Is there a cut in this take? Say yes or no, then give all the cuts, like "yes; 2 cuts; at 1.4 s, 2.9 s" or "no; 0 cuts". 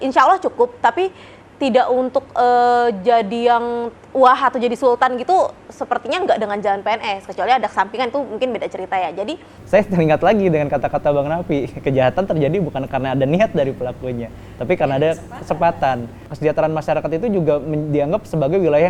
yes; 2 cuts; at 9.5 s, 16.3 s